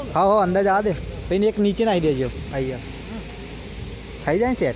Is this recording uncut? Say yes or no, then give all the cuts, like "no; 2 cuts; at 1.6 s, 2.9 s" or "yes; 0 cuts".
yes; 0 cuts